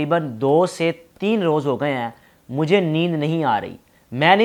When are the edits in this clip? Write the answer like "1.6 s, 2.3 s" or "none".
none